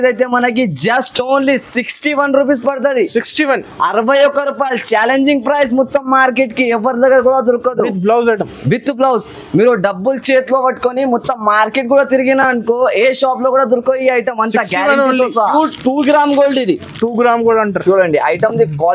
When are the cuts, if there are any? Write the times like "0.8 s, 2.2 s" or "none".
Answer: 15.3 s